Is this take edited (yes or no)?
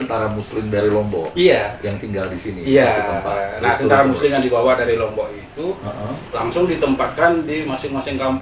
no